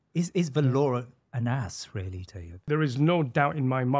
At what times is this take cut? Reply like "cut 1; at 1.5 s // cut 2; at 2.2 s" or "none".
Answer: cut 1; at 2.6 s